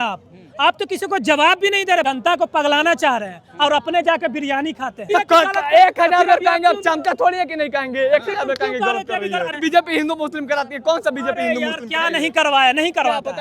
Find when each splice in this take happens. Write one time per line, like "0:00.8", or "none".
0:02.0
0:05.1
0:09.5